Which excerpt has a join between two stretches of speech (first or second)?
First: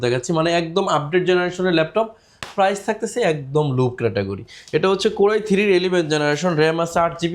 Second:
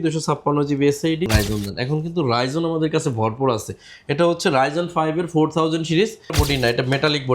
second